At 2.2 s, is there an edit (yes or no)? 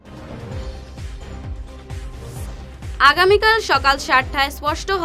no